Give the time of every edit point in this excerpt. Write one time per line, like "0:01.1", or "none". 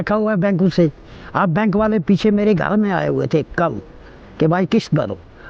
none